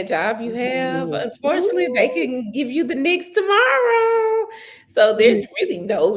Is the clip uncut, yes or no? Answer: yes